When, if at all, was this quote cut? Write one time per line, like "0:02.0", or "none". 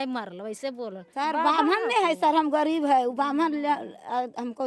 0:01.0